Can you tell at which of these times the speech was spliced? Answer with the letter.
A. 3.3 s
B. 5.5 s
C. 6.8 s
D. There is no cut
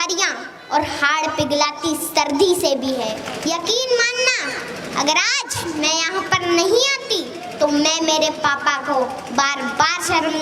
A